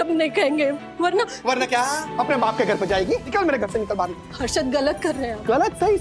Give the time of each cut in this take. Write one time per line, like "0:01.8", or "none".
0:02.1
0:03.3